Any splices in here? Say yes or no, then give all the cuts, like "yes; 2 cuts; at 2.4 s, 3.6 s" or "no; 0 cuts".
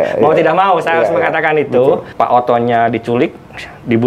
yes; 1 cut; at 2.1 s